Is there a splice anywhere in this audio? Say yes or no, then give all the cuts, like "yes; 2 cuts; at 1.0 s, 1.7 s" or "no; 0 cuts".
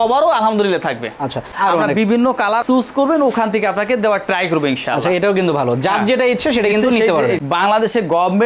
yes; 3 cuts; at 1.5 s, 2.6 s, 7.4 s